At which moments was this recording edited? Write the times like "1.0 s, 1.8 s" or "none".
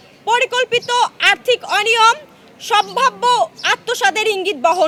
none